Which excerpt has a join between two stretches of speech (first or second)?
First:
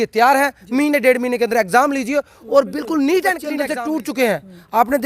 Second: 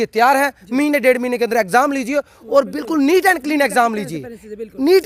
first